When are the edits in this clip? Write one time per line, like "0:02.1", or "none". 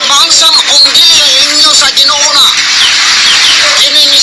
none

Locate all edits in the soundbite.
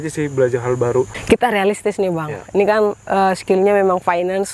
0:01.2

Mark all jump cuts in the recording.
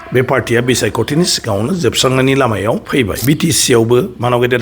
0:03.2

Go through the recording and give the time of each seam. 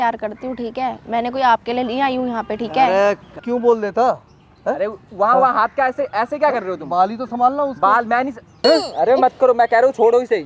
0:03.4
0:08.6

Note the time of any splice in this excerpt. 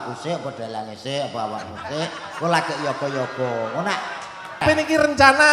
0:04.6

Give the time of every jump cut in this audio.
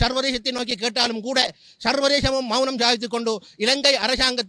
none

